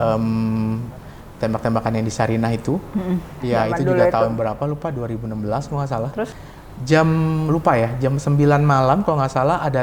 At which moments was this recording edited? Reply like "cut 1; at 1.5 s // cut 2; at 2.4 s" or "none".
cut 1; at 3.4 s // cut 2; at 6.3 s